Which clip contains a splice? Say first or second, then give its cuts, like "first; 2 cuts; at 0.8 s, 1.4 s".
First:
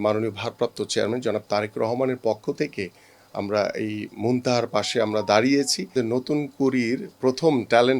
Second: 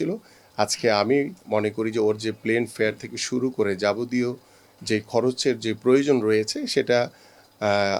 first; 1 cut; at 5.9 s